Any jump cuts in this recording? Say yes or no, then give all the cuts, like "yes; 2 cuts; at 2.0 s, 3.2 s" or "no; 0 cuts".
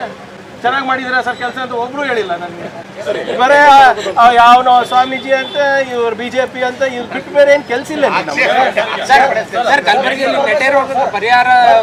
no; 0 cuts